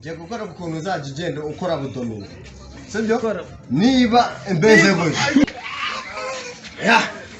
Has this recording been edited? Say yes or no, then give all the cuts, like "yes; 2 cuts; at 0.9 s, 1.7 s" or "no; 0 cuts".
yes; 1 cut; at 5.4 s